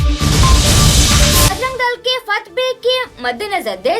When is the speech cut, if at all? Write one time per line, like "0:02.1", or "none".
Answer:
0:01.5